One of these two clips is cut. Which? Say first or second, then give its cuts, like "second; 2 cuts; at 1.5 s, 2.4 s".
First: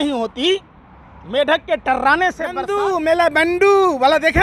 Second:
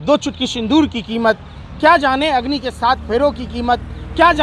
first; 1 cut; at 2.5 s